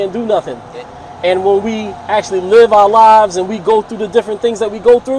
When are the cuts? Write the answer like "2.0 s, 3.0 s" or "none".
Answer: none